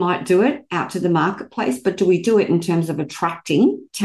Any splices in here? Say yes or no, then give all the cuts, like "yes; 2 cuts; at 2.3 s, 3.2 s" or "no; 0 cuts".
no; 0 cuts